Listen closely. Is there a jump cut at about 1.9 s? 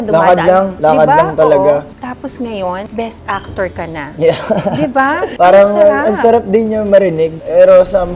yes; 3 cuts; at 1.9 s, 2.9 s, 5.3 s

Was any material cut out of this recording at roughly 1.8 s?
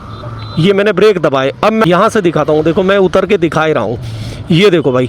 yes; 1 cut; at 1.8 s

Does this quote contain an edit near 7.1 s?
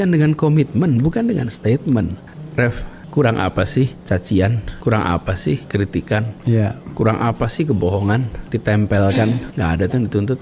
no; 6 cuts; at 2.4 s, 4.0 s, 4.7 s, 5.6 s, 8.4 s, 9.5 s

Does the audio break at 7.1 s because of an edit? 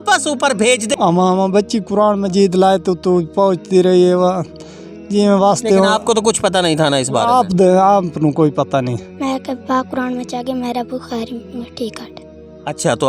no; 2 cuts; at 0.9 s, 9.1 s

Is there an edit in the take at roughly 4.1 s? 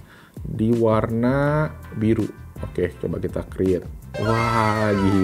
yes; 1 cut; at 4.1 s

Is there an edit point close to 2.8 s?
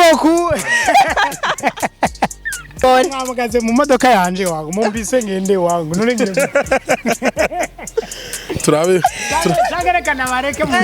yes; 1 cut; at 2.8 s

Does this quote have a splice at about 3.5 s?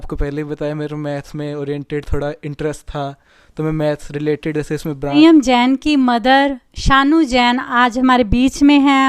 no; 1 cut; at 5.2 s

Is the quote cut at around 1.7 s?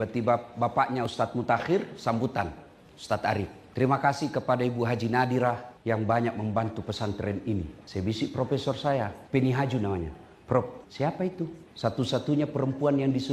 no; 6 cuts; at 3.6 s, 5.7 s, 7.8 s, 9.2 s, 10.8 s, 11.6 s

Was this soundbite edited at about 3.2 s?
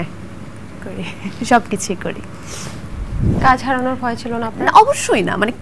yes; 1 cut; at 3.2 s

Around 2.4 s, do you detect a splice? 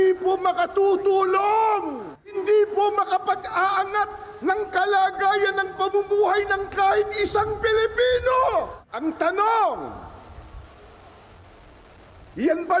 yes; 2 cuts; at 2.4 s, 8.8 s

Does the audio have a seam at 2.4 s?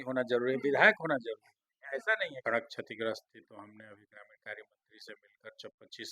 yes; 1 cut; at 2.4 s

